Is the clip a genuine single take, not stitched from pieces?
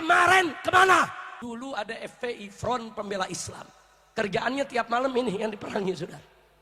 no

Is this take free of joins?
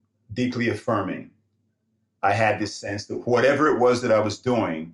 yes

